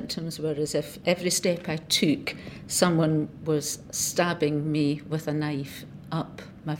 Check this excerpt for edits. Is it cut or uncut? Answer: cut